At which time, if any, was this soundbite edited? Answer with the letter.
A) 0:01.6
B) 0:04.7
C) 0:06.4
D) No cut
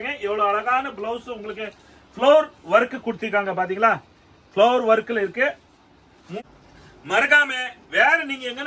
C